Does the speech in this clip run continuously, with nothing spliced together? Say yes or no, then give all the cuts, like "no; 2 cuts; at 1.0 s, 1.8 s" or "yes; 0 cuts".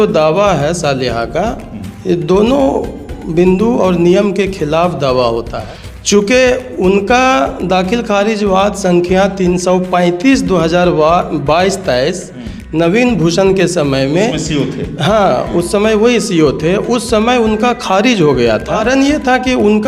no; 2 cuts; at 5.5 s, 18.8 s